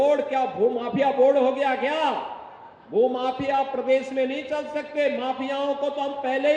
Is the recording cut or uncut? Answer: uncut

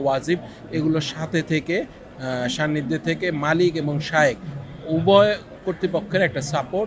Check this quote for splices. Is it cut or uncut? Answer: uncut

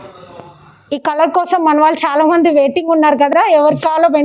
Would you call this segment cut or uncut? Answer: uncut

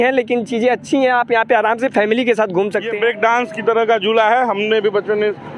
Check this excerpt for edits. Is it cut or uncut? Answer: cut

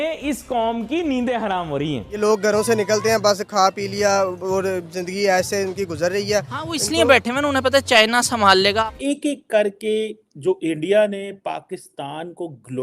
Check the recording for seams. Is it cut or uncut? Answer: cut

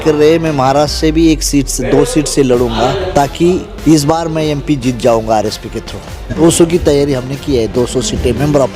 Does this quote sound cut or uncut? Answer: cut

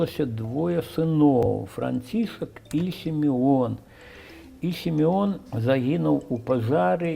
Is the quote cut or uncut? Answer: cut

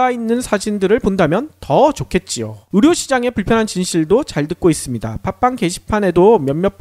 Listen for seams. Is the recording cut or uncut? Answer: cut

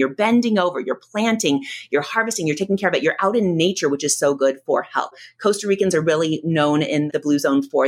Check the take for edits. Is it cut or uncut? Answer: cut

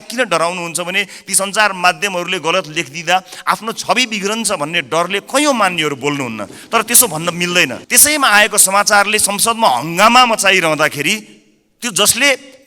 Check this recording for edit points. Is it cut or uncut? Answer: cut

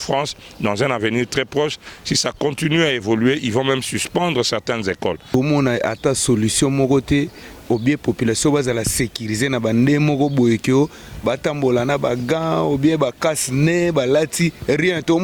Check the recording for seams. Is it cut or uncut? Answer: cut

